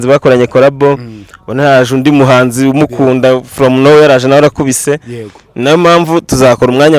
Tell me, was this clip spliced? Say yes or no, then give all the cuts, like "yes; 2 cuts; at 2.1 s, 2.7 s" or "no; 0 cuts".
no; 0 cuts